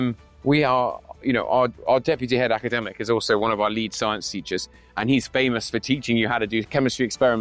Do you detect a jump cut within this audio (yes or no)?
no